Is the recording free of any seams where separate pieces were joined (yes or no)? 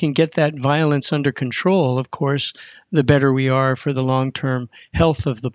yes